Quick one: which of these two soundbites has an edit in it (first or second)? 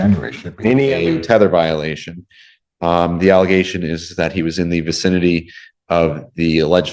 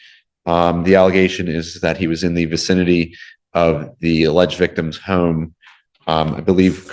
first